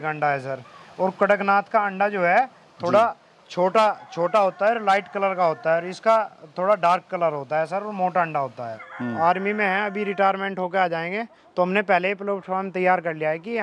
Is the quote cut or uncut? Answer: cut